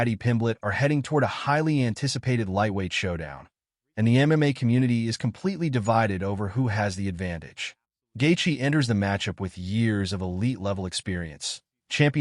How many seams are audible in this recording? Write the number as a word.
one